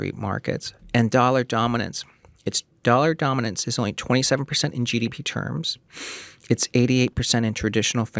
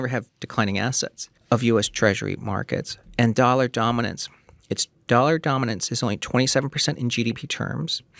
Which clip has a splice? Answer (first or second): second